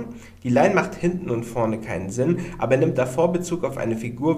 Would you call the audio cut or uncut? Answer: uncut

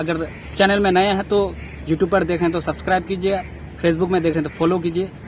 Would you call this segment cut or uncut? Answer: uncut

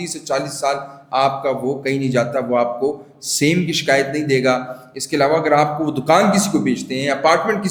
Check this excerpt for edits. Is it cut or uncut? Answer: uncut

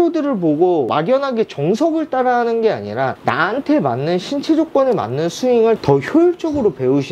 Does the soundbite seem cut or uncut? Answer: uncut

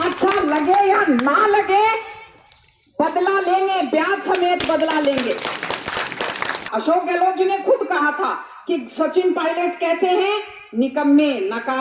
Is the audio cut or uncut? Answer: cut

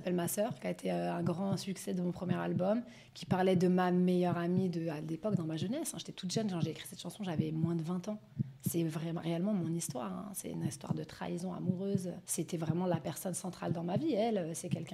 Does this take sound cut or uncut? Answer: cut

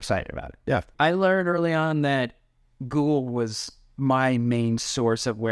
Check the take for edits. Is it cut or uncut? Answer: cut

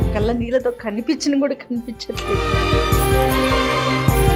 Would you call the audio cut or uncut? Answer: uncut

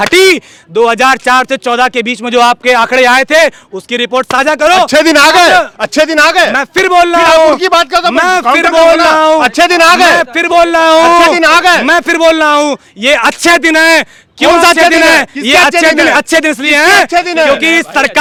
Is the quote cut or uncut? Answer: uncut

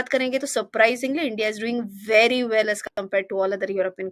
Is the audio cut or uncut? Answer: uncut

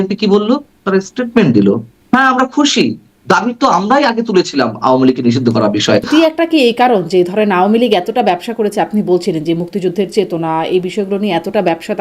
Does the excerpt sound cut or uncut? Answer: cut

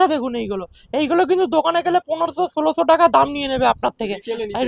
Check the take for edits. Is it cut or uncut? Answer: uncut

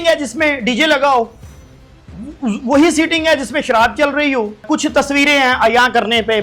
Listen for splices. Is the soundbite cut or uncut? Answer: cut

